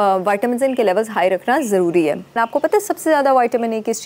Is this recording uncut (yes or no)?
no